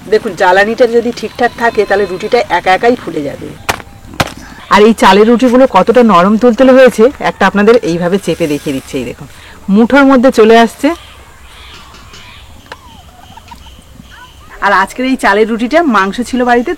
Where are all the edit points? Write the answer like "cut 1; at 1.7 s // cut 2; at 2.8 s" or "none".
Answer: cut 1; at 3.5 s // cut 2; at 4.5 s // cut 3; at 12.6 s // cut 4; at 14.5 s